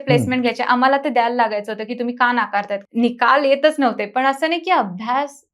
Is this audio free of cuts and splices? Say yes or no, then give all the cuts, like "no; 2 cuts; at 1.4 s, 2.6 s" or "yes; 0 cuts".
no; 1 cut; at 2.8 s